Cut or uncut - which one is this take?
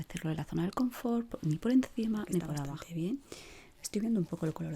cut